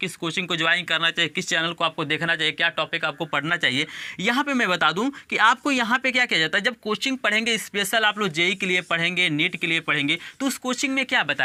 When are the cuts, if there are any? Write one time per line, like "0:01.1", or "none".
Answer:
none